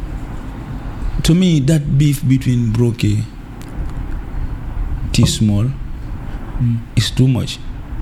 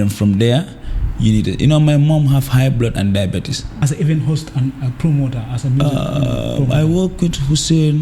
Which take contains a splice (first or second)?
second